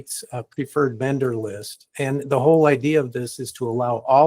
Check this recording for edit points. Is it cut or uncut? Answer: uncut